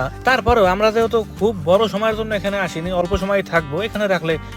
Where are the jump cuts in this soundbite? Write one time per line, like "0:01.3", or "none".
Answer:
none